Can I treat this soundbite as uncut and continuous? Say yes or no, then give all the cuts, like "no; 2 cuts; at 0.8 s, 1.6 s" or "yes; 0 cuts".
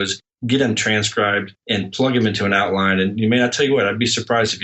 no; 1 cut; at 1.5 s